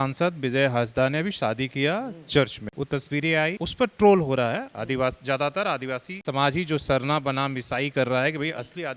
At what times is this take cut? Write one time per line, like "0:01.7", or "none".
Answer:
0:02.6
0:03.6
0:06.1